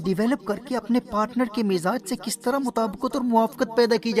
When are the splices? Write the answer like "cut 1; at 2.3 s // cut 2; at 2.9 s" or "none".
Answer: none